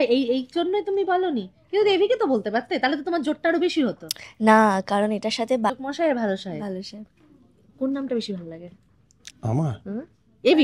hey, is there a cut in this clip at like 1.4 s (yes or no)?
no